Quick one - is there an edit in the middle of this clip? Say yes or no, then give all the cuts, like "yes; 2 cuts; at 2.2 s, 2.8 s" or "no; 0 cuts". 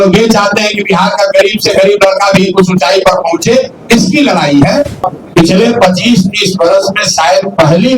yes; 1 cut; at 5.0 s